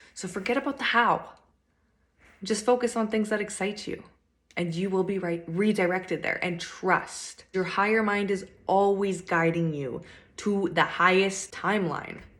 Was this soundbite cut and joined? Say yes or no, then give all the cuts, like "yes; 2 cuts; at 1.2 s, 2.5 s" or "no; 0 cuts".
yes; 2 cuts; at 7.5 s, 11.5 s